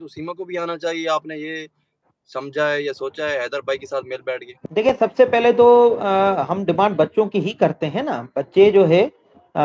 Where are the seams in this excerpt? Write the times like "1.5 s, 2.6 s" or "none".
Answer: none